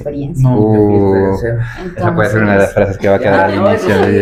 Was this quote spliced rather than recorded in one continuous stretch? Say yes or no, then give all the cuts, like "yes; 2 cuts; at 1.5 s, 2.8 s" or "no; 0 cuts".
no; 0 cuts